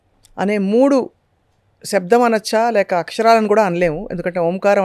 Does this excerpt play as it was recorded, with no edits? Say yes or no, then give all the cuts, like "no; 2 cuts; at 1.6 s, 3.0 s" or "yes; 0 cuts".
yes; 0 cuts